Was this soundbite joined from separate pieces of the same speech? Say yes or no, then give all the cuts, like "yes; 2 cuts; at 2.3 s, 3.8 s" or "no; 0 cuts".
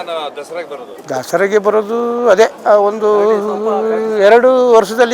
no; 0 cuts